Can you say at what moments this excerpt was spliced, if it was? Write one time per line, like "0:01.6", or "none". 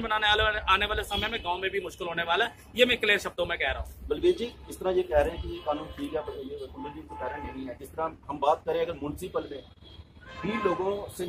none